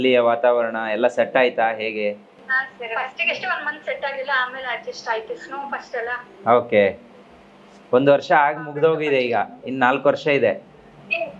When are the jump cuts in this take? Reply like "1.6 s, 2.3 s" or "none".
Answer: none